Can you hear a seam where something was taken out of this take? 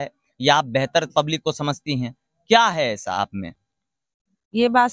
no; 0 cuts

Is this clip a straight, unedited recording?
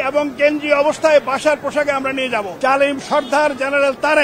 no; 1 cut; at 2.5 s

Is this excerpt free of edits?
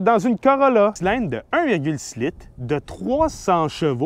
no; 1 cut; at 1.0 s

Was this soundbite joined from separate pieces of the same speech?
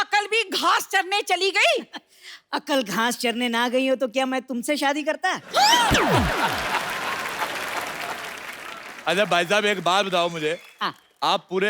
no; 0 cuts

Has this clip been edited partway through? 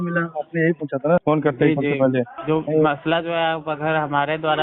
yes; 2 cuts; at 1.2 s, 2.4 s

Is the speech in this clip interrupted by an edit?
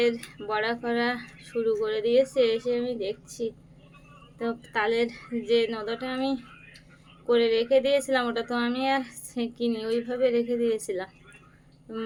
no; 0 cuts

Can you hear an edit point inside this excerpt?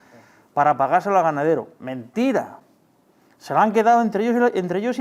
no; 0 cuts

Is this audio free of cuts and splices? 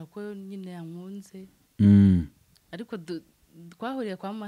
yes; 0 cuts

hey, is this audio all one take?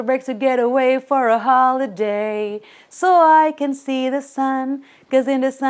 yes; 0 cuts

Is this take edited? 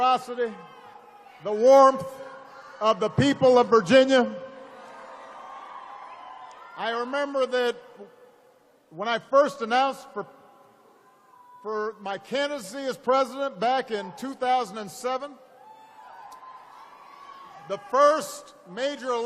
no; 0 cuts

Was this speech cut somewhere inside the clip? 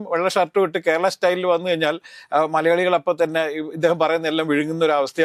no; 0 cuts

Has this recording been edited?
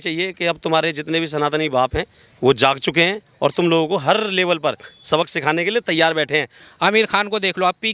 yes; 1 cut; at 6.6 s

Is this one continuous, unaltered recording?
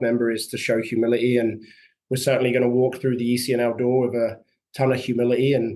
yes; 0 cuts

